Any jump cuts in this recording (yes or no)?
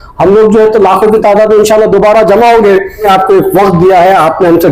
yes